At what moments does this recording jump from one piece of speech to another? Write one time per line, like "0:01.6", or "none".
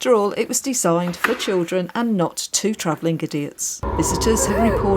0:03.9

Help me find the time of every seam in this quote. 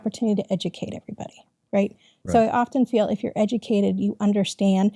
none

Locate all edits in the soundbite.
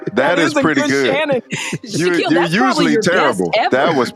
none

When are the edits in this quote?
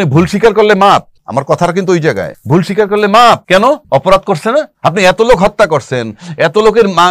0:01.2
0:02.3
0:03.7
0:04.7

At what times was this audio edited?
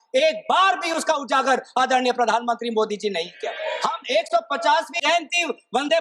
0:03.5
0:05.0

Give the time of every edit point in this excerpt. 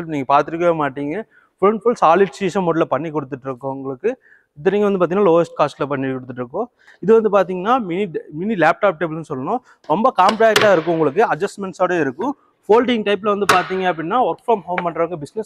0:06.8

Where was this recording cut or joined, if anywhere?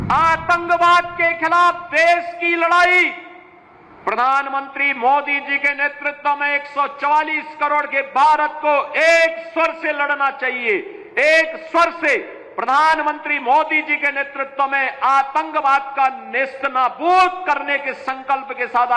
none

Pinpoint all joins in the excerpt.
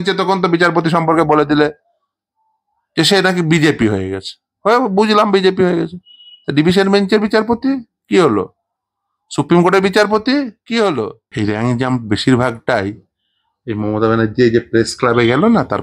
0:11.2

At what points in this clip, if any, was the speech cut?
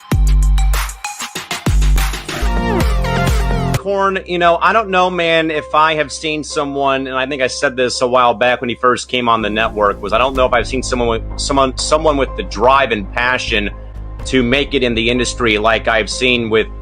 0:03.8

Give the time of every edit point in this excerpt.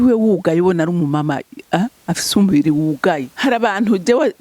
0:03.3

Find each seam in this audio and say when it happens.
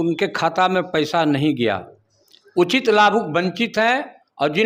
none

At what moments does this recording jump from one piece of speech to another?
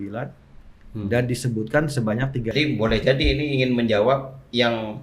0:02.5

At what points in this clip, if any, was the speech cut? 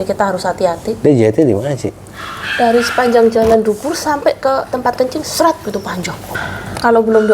0:06.2

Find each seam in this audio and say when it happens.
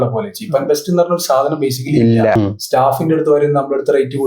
0:02.3

